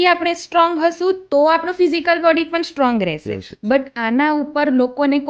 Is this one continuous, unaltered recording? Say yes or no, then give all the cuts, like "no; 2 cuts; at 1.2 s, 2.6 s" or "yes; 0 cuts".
yes; 0 cuts